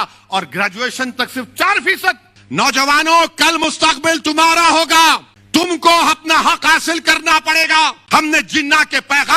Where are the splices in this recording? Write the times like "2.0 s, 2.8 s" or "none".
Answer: 2.3 s, 5.3 s, 8.0 s